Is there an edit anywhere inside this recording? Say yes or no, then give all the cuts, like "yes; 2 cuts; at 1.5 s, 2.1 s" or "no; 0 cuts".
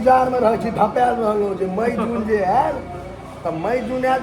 no; 0 cuts